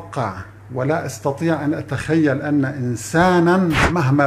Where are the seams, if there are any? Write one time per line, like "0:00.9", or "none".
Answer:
none